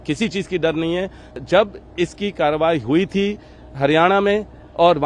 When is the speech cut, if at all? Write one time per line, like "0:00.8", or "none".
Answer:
0:01.4